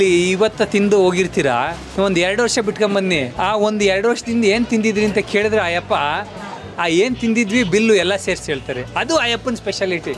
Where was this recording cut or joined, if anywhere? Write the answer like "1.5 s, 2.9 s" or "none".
none